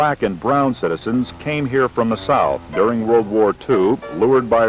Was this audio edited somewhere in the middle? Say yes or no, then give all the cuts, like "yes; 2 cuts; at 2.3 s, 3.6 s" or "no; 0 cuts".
no; 0 cuts